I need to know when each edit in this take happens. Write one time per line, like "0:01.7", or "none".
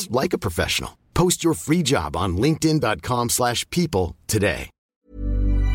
0:04.8